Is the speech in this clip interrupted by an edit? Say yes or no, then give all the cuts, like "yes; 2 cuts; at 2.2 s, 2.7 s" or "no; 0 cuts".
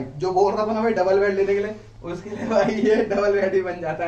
no; 0 cuts